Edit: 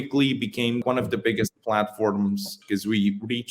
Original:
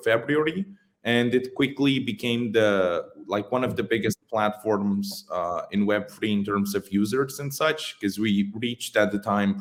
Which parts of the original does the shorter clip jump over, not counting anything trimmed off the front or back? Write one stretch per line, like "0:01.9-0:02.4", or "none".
0:02.5-0:03.5
0:05.2-0:07.9